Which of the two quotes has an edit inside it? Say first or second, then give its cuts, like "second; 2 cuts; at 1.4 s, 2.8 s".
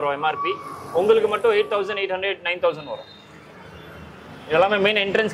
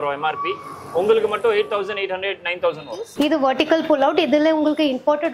second; 1 cut; at 3.1 s